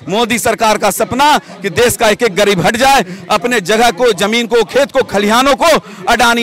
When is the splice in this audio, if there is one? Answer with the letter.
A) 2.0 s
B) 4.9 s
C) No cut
C